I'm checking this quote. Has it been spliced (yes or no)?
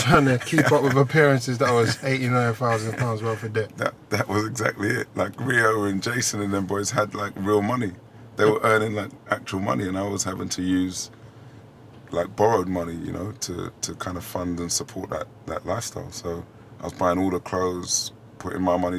no